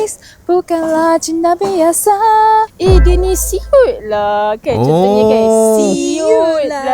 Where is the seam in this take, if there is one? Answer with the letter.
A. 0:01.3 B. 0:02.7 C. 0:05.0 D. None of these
B